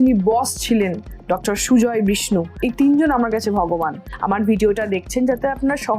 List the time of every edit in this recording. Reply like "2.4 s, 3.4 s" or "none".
2.6 s, 4.0 s